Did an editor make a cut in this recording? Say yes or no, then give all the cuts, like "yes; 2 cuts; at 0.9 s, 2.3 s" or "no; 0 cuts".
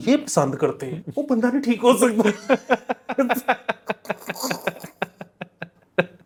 no; 0 cuts